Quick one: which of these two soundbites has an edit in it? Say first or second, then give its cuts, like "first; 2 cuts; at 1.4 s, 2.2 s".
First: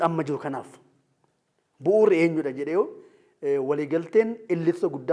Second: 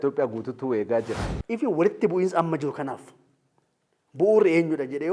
second; 1 cut; at 1.2 s